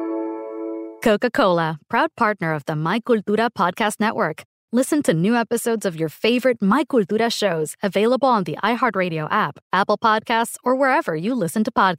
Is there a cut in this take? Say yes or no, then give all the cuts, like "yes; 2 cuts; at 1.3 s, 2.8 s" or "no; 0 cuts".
yes; 1 cut; at 0.9 s